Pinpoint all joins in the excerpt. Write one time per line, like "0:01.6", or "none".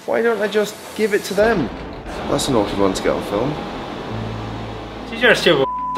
0:02.1